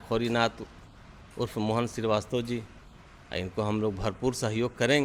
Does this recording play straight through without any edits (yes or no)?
yes